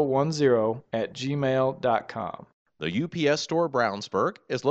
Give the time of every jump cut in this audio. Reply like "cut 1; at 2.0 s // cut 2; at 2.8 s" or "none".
cut 1; at 2.6 s